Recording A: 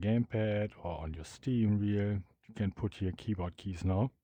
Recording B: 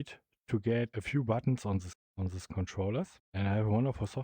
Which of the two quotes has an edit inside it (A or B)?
B